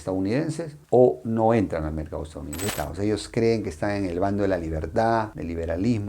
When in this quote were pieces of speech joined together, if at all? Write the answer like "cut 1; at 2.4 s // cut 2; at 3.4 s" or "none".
cut 1; at 2.6 s